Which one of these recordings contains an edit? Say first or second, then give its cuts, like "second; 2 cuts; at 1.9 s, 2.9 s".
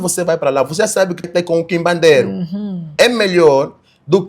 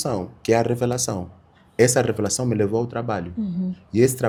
first; 1 cut; at 1.3 s